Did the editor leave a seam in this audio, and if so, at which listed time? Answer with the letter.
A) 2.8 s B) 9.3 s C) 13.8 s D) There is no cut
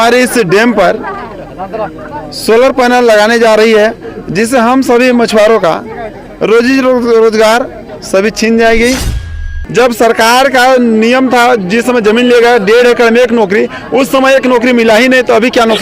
B